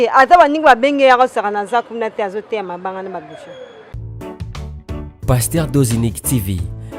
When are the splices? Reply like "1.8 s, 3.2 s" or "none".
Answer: 4.0 s